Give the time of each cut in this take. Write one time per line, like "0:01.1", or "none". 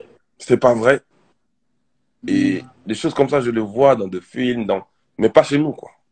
none